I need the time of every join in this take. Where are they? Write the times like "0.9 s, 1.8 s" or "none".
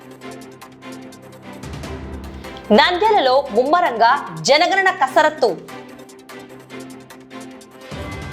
none